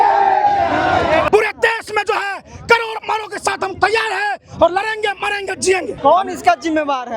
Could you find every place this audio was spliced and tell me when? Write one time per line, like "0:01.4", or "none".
0:01.3
0:05.9